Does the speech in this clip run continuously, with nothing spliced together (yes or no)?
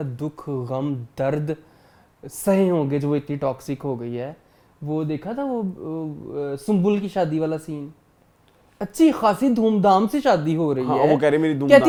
yes